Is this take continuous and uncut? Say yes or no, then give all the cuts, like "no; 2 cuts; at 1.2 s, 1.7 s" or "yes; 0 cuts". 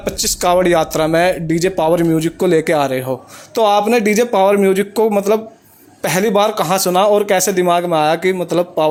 yes; 0 cuts